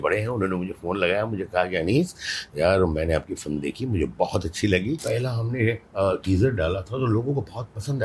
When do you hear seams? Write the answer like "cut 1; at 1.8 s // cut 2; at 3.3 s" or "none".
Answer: cut 1; at 5.0 s